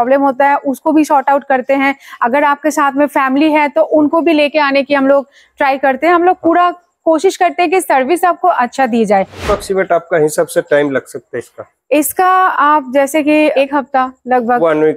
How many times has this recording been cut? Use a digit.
2